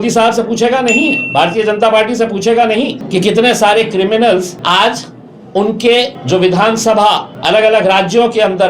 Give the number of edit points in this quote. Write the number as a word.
four